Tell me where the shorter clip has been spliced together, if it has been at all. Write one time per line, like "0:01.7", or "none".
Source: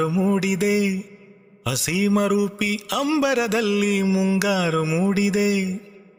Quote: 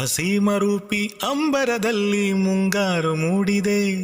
none